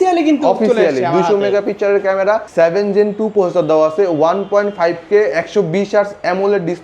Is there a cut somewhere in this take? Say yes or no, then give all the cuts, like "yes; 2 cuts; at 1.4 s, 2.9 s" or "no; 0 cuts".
yes; 1 cut; at 2.5 s